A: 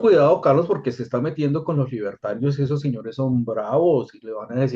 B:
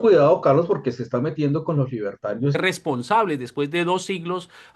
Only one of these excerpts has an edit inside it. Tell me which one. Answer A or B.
B